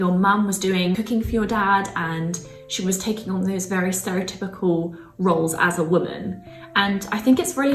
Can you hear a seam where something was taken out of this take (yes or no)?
no